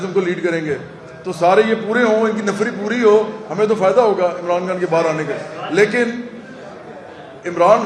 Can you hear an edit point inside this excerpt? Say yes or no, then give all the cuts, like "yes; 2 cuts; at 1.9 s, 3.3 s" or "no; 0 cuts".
no; 0 cuts